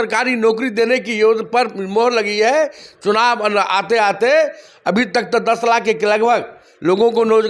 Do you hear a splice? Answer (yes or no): no